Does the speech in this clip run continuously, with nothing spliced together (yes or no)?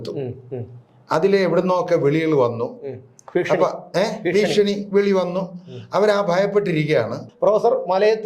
no